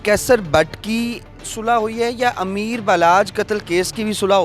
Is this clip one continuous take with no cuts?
yes; 0 cuts

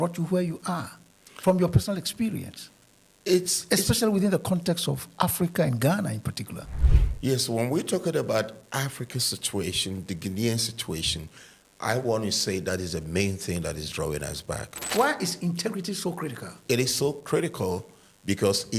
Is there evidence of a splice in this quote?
yes; 2 cuts; at 14.9 s, 16.5 s

